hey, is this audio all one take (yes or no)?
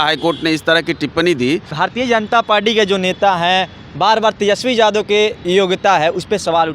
no